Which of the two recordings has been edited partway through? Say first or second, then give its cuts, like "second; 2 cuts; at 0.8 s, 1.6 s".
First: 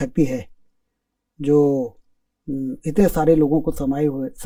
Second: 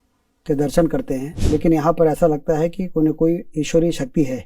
second; 1 cut; at 1.3 s